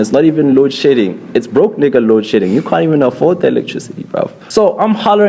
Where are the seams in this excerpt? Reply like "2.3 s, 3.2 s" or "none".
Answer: 4.4 s